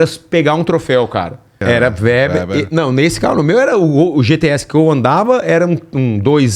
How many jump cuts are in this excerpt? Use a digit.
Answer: 1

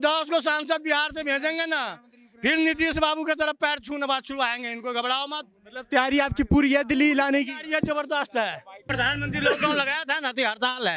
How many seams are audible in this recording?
1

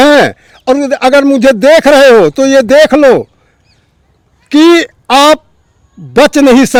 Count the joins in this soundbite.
0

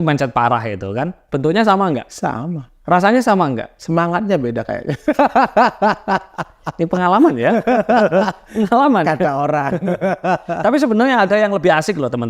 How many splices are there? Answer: 3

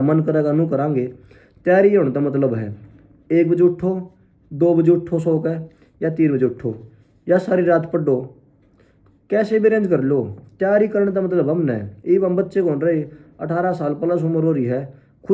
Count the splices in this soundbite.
0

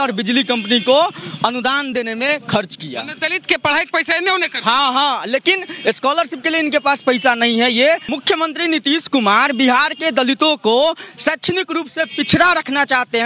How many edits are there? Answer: 1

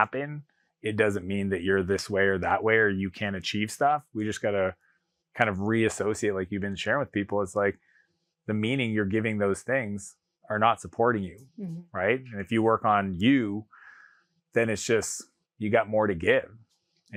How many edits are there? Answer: 0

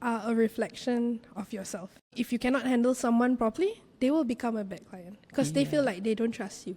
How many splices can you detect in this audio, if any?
1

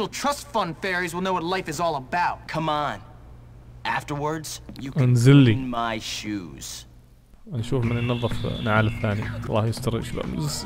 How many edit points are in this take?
3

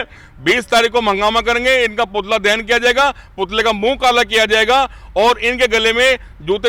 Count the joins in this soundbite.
0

